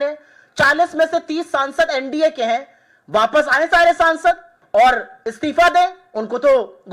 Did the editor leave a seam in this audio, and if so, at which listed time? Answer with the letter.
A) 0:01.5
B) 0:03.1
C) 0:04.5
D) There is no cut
C